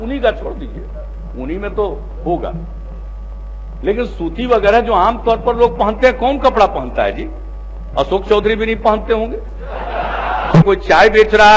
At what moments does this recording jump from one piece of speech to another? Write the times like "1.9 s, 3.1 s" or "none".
10.6 s